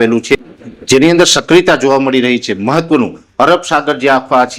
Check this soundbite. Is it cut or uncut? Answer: uncut